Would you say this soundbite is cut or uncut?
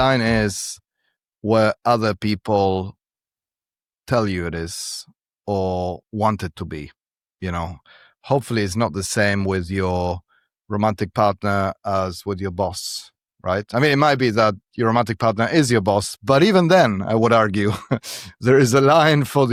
uncut